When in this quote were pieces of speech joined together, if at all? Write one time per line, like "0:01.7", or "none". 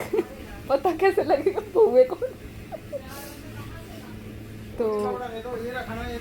none